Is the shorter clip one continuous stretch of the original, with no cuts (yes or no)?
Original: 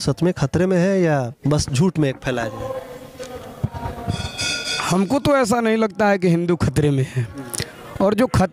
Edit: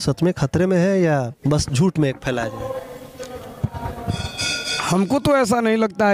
yes